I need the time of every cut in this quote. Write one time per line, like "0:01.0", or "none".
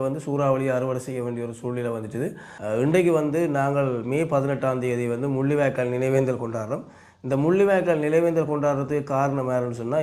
0:02.5